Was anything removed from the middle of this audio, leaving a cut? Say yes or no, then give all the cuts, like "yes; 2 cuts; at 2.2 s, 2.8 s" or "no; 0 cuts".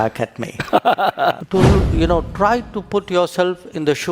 yes; 1 cut; at 1.4 s